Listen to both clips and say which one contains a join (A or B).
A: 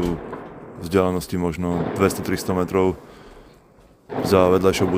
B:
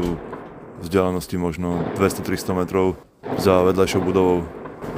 B